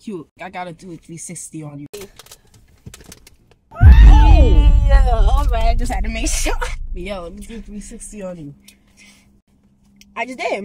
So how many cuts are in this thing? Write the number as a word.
two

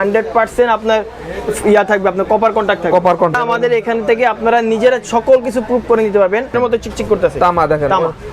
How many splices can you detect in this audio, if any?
two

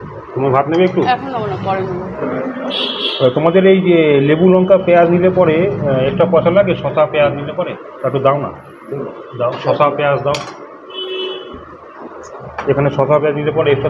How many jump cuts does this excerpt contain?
one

